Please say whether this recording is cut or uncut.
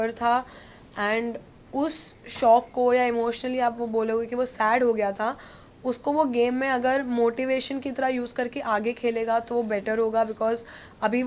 uncut